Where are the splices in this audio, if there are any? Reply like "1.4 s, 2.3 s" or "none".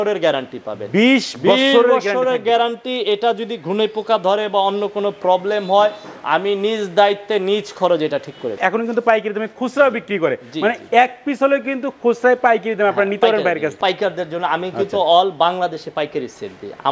8.6 s, 13.7 s